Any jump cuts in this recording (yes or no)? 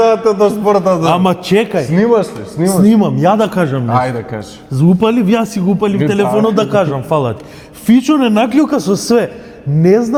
no